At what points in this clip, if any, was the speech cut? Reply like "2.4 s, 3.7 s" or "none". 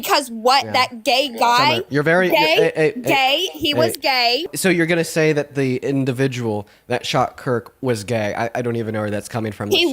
4.5 s